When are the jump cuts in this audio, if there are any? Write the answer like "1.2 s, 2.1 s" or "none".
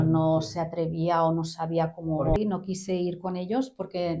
2.4 s

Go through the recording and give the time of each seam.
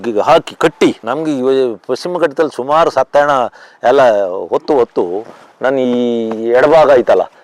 1.0 s

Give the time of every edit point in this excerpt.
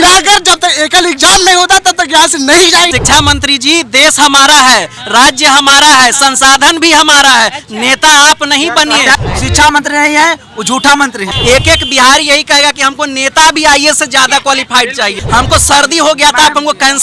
2.9 s, 9.1 s, 11.3 s, 15.2 s

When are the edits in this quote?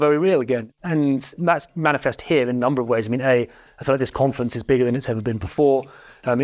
1.3 s

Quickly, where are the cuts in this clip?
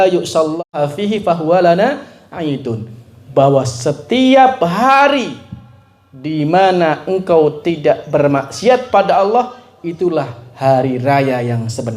none

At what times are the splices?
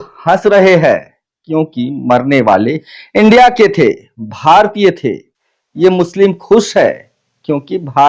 none

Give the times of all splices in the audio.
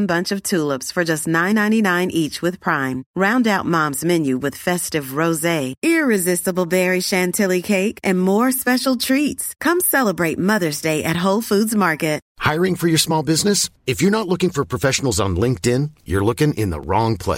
12.3 s

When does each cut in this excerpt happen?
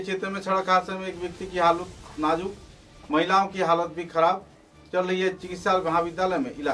none

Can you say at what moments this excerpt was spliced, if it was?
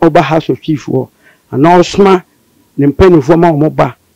none

